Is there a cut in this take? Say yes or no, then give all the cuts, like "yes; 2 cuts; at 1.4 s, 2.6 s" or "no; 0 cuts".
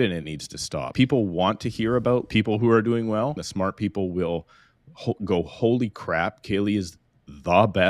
yes; 3 cuts; at 0.9 s, 2.3 s, 3.4 s